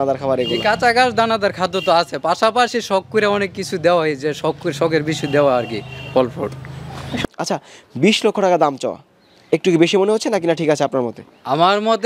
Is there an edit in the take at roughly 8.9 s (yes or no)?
no